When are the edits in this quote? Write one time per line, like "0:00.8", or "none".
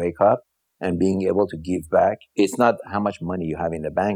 0:02.2